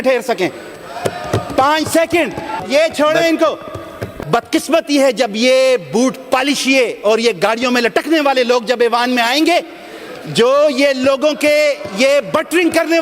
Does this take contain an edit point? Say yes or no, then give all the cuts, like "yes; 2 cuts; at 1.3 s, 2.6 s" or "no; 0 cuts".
yes; 2 cuts; at 2.6 s, 4.1 s